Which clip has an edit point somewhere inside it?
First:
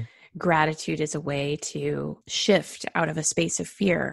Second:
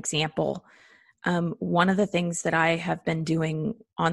first; 1 cut; at 2.3 s

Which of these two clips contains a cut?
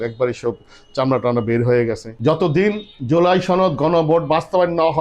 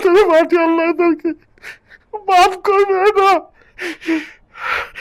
first; 1 cut; at 2.1 s

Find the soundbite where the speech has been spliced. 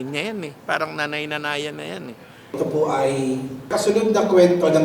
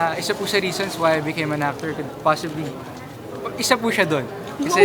first; 2 cuts; at 2.4 s, 3.7 s

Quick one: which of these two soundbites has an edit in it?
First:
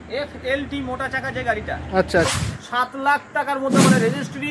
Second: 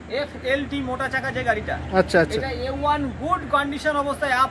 first; 1 cut; at 2.3 s

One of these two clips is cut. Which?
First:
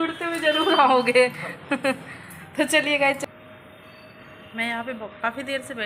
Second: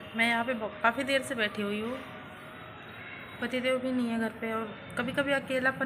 first; 1 cut; at 3.2 s

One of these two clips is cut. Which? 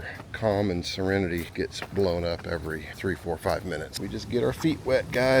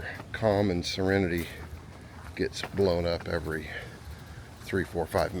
first; 3 cuts; at 1.5 s, 2.9 s, 3.9 s

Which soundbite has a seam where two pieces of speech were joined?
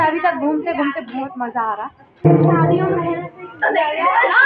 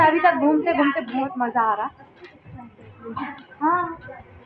first; 1 cut; at 2.2 s

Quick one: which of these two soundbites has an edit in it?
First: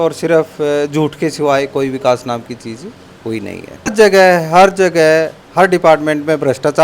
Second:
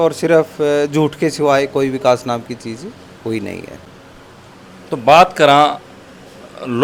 first; 1 cut; at 3.9 s

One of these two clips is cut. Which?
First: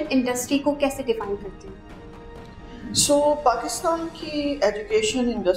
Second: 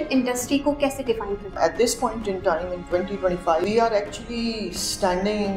second; 2 cuts; at 1.6 s, 3.6 s

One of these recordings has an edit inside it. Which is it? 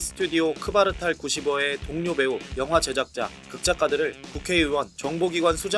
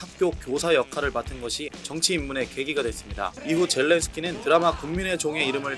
second; 3 cuts; at 1.8 s, 3.4 s, 4.3 s

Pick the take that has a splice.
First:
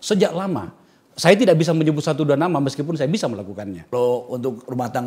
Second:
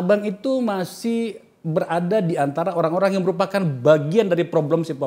first; 1 cut; at 3.8 s

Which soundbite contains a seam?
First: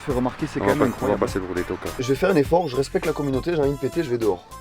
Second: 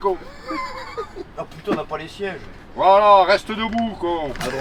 first; 1 cut; at 1.9 s

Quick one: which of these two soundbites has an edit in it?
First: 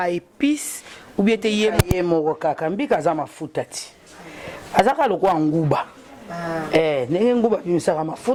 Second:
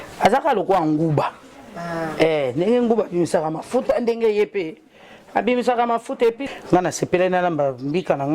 second; 1 cut; at 6.5 s

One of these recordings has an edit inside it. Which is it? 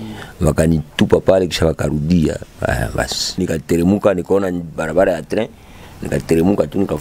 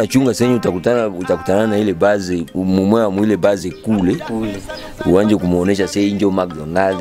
first; 2 cuts; at 0.9 s, 3.4 s

